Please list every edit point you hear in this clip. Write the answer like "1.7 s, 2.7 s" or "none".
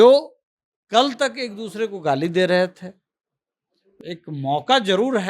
3.9 s